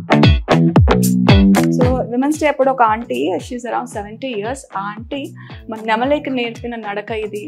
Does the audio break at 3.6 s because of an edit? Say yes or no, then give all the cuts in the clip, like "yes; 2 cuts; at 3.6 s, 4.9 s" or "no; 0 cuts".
no; 1 cut; at 1.8 s